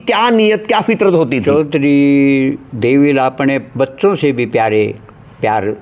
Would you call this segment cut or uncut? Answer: uncut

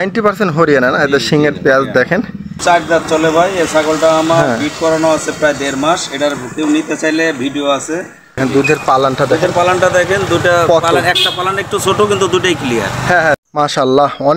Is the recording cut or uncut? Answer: cut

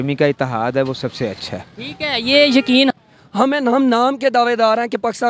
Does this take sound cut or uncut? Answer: cut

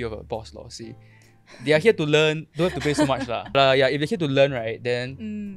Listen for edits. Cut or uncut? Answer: cut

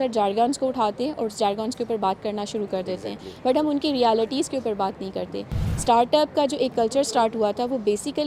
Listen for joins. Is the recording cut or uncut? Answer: uncut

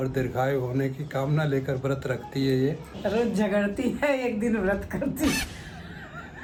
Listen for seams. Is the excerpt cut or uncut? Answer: uncut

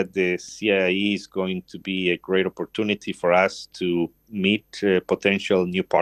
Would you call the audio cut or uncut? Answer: uncut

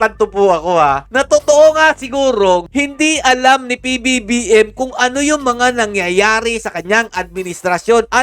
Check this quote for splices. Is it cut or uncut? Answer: uncut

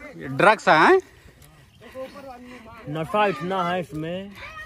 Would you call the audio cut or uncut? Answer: uncut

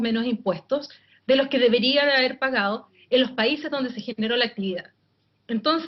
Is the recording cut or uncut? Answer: cut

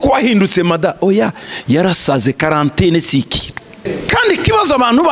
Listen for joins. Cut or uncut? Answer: cut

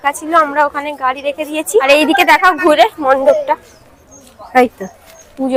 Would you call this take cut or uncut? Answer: uncut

